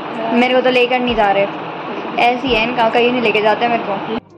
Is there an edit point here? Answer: no; 0 cuts

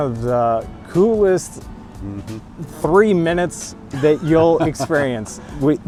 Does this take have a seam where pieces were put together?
no; 0 cuts

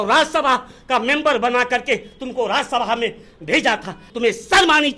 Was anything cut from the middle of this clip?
yes; 1 cut; at 4.1 s

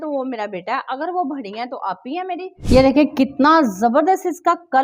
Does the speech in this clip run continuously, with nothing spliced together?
no; 1 cut; at 2.5 s

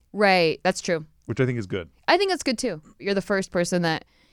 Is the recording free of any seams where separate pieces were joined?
no; 1 cut; at 3.0 s

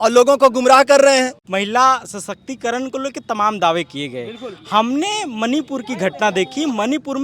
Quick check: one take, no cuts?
no; 1 cut; at 1.4 s

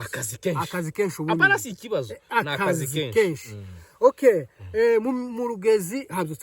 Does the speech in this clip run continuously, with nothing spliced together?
yes; 0 cuts

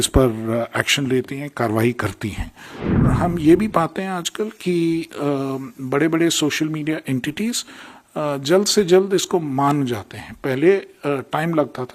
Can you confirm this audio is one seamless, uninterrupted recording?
no; 1 cut; at 3.0 s

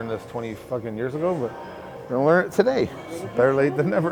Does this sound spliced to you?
no; 0 cuts

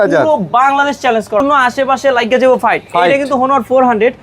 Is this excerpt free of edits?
no; 1 cut; at 1.4 s

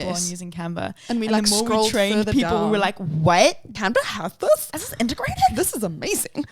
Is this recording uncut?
no; 1 cut; at 3.7 s

